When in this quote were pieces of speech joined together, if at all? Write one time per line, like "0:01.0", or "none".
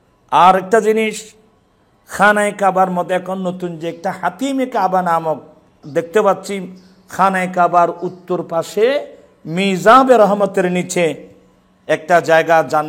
0:05.8